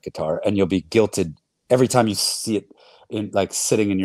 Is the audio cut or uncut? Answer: uncut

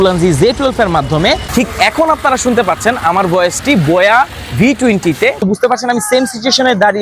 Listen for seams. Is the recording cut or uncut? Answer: cut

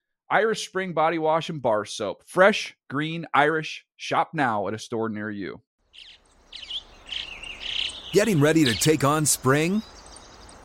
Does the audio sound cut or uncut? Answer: cut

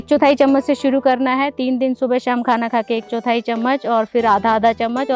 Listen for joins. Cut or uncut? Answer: uncut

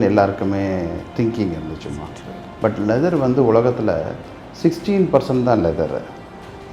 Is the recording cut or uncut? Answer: uncut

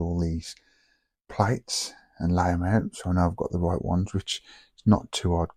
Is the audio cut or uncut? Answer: uncut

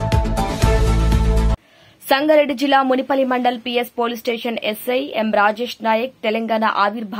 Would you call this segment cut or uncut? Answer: cut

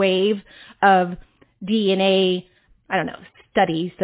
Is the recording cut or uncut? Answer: cut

